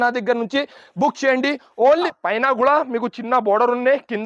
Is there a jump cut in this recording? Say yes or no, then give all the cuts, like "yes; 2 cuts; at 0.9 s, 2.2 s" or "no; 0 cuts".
yes; 1 cut; at 2.1 s